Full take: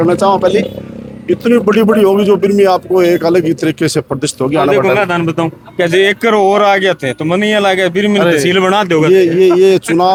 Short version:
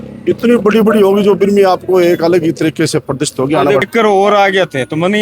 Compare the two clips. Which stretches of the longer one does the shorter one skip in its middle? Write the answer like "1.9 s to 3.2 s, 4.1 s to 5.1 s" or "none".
4.8 s to 6.1 s